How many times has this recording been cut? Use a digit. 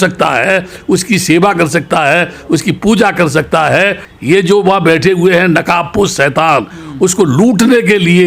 1